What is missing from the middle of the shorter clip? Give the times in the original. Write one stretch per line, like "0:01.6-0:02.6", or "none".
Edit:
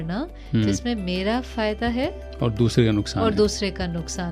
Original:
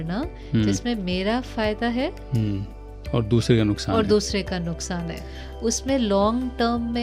0:02.2-0:02.9